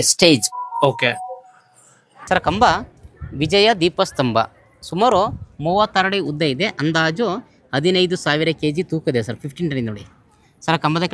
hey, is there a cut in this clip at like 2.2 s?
yes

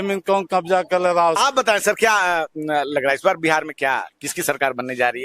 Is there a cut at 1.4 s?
yes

